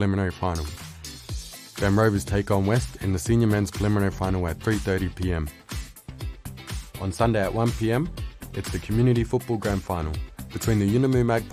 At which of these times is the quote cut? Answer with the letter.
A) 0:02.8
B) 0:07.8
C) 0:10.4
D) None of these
D